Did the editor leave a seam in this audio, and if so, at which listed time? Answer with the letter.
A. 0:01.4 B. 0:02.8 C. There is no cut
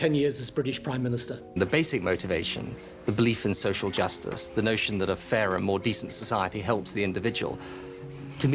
A